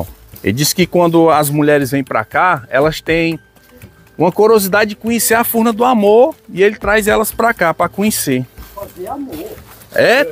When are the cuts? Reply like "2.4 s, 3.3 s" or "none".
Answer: none